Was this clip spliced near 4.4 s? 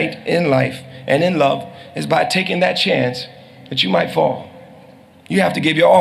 no; 0 cuts

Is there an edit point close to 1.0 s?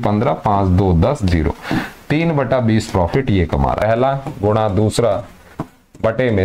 no; 1 cut; at 3.8 s

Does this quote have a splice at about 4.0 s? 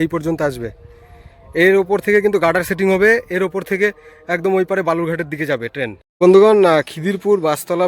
no; 1 cut; at 6.0 s

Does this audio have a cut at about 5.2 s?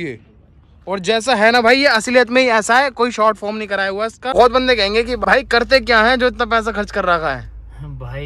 yes; 2 cuts; at 4.3 s, 5.2 s

